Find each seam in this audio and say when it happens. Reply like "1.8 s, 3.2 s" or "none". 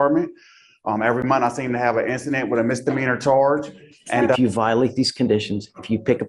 4.4 s